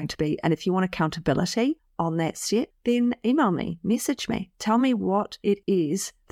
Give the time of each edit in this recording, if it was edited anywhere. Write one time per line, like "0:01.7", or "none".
none